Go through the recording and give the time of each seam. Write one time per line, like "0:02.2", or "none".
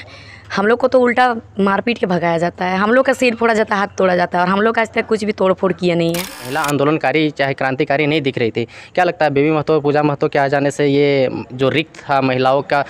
0:06.5